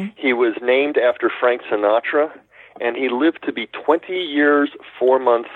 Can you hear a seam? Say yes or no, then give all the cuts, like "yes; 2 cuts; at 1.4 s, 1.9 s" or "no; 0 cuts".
no; 0 cuts